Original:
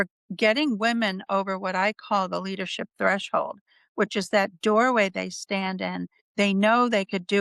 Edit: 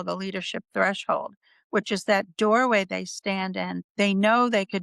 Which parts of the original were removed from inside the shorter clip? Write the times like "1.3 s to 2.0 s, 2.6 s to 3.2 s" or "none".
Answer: 6.1 s to 6.2 s